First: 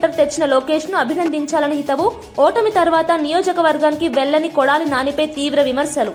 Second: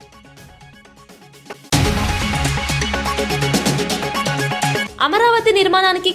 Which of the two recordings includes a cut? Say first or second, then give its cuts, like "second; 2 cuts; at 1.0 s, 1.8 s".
second; 2 cuts; at 1.7 s, 4.8 s